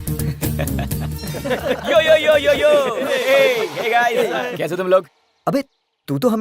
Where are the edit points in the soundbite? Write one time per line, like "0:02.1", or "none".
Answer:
0:01.2